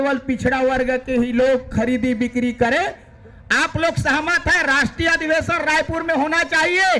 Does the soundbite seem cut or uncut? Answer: cut